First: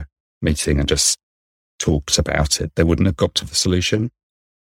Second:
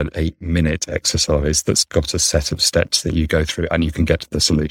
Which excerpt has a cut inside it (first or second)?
first